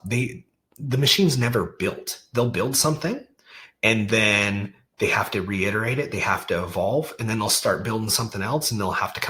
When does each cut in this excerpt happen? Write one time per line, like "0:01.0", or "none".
none